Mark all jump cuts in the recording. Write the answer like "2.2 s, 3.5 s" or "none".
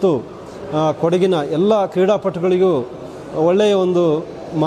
none